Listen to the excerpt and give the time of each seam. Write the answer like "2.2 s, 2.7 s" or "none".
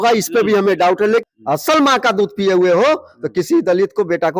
1.2 s